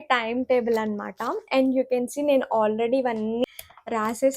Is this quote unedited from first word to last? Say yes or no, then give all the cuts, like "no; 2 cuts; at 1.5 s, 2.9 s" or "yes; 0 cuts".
no; 1 cut; at 3.4 s